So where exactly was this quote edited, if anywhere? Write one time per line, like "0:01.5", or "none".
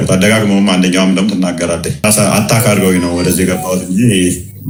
none